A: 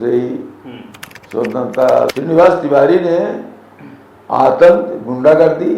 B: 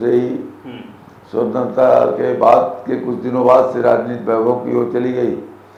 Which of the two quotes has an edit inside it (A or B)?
A